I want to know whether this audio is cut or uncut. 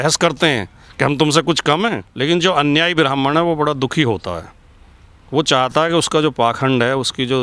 cut